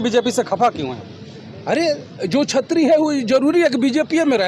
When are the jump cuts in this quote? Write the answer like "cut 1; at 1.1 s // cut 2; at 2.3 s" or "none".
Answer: none